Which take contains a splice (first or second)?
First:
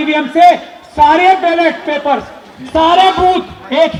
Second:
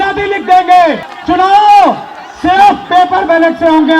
second